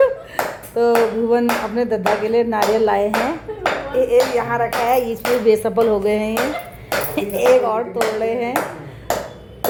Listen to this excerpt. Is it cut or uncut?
uncut